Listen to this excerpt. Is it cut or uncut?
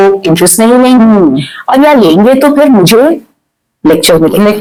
uncut